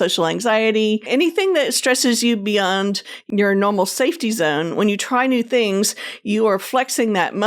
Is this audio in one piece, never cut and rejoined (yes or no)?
no